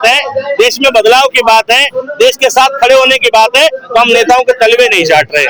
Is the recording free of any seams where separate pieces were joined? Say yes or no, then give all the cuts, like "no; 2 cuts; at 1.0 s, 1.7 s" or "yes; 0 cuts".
yes; 0 cuts